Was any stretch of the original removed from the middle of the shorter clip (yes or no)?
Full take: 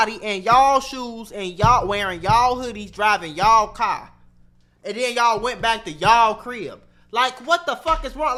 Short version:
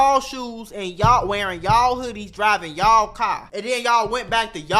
yes